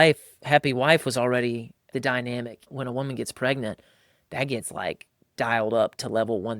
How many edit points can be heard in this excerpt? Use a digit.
2